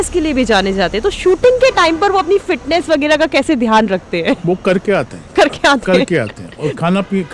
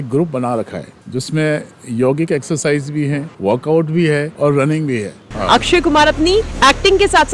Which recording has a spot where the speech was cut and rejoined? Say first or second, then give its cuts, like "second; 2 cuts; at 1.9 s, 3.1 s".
second; 5 cuts; at 0.9 s, 3.3 s, 4.3 s, 5.3 s, 6.5 s